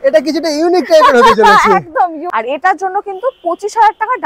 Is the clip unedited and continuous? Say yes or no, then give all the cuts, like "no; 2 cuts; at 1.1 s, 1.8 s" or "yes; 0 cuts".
no; 1 cut; at 2.3 s